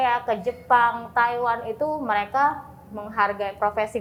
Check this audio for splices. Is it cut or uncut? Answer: uncut